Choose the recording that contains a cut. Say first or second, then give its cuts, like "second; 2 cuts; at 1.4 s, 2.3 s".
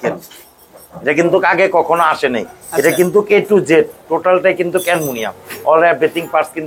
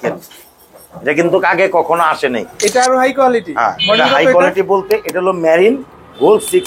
second; 1 cut; at 2.5 s